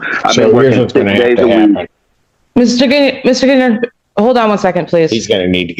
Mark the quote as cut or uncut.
uncut